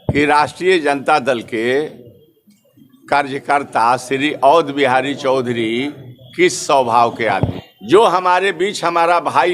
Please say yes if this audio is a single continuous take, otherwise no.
no